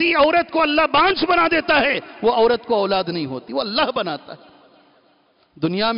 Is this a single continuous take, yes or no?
yes